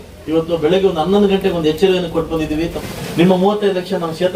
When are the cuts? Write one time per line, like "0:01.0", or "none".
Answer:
0:02.8